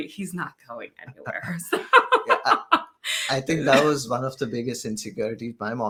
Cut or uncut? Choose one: uncut